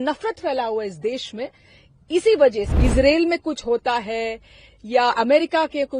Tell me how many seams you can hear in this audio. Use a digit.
1